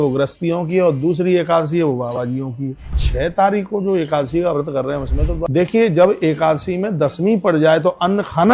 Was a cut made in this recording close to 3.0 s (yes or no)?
yes